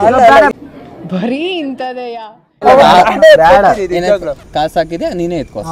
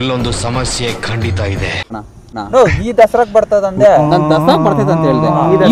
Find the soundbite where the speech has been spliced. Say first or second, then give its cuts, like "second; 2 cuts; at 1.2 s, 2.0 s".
second; 1 cut; at 2.1 s